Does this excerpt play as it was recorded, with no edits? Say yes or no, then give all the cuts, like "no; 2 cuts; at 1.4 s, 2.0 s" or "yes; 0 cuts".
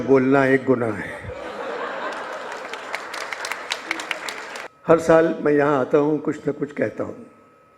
no; 1 cut; at 4.6 s